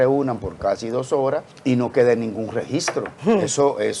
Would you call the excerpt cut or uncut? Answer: cut